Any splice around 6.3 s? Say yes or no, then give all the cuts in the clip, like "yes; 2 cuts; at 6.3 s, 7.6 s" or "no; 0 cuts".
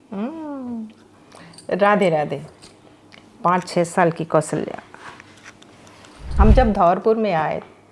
yes; 1 cut; at 6.3 s